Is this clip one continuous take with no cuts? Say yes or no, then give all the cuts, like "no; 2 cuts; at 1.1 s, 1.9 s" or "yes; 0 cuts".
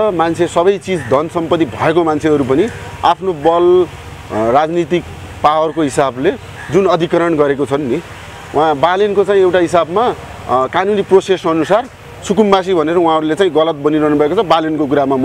yes; 0 cuts